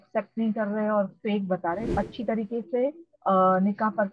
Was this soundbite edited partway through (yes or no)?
yes